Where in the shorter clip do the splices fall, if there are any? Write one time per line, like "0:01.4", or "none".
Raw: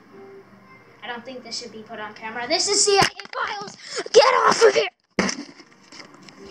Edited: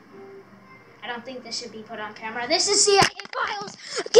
none